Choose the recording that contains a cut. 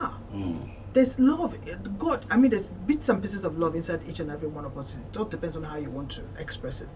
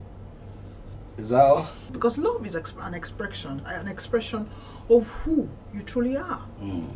second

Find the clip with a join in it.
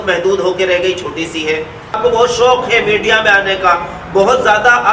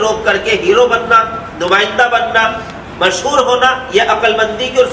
first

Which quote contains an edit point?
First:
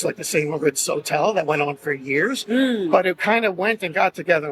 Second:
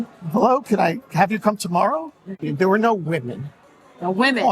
second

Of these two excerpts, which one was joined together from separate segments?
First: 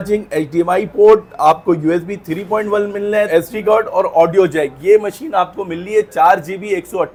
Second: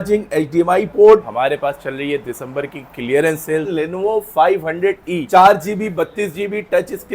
second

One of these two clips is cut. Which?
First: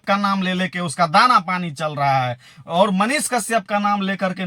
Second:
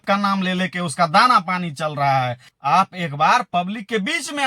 second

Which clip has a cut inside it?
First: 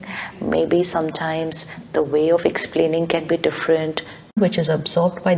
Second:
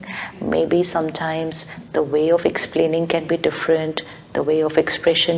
first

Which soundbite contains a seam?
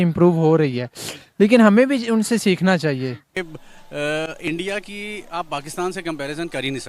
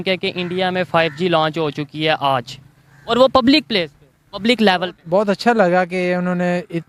first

